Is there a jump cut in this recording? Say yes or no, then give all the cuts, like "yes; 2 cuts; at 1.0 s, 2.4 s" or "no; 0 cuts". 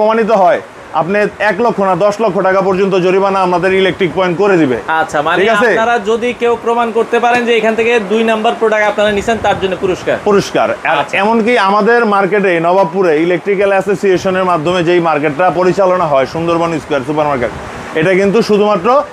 no; 0 cuts